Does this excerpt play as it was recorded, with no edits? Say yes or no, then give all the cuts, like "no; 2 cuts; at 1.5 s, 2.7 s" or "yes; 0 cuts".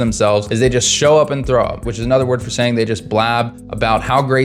no; 1 cut; at 1.9 s